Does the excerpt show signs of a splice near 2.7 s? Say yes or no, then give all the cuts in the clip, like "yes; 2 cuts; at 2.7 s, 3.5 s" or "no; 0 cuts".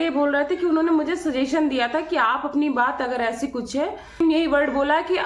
no; 1 cut; at 4.2 s